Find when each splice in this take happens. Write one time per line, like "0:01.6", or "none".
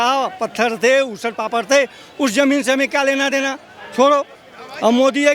none

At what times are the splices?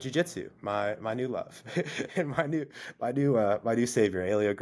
none

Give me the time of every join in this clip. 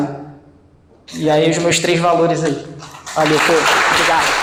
none

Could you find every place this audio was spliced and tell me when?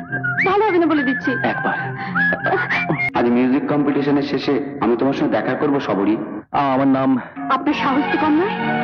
0:03.0

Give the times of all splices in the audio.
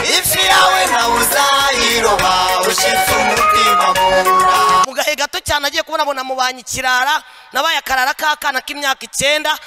0:04.8

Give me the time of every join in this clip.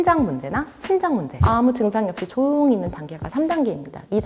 0:01.3

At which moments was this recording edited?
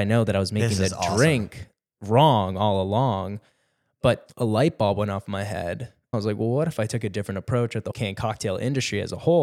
0:04.3
0:06.1
0:07.9

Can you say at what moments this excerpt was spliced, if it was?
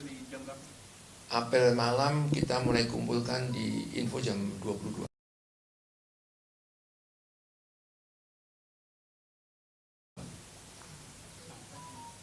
none

